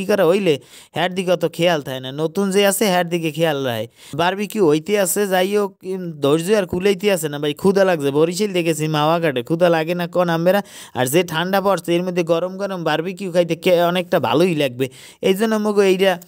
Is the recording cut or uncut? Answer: uncut